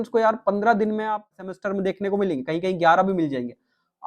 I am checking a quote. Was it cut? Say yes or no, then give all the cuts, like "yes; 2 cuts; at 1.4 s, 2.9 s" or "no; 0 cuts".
yes; 1 cut; at 1.5 s